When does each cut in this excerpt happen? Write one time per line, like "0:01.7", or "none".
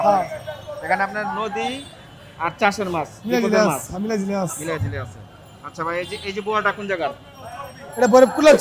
none

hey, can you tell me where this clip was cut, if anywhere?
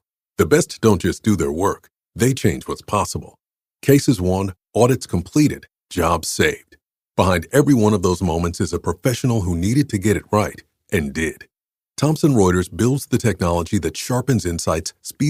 none

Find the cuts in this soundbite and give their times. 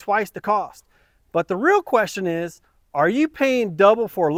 none

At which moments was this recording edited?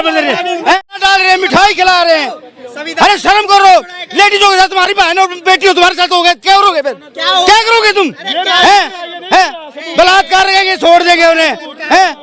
0:01.0

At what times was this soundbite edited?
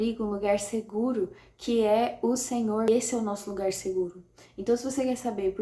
0:02.9

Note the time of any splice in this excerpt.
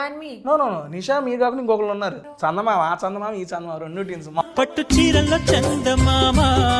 0:02.2
0:04.4

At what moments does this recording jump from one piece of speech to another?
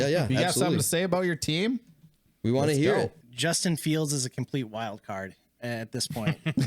0:03.1

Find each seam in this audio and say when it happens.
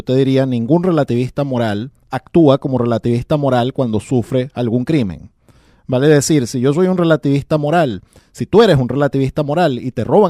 0:01.8

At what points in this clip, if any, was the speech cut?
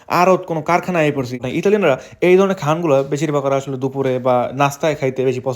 0:01.5

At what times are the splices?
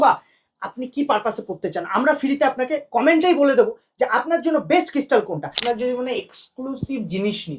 0:05.5

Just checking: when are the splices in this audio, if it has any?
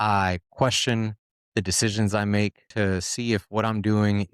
0:02.7

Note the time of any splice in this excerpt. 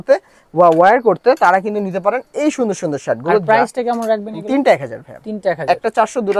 none

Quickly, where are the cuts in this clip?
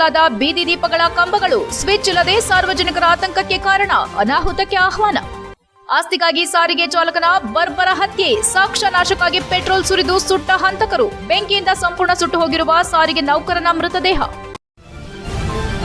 0:14.6

